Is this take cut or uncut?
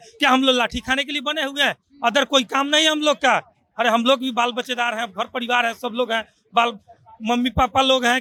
uncut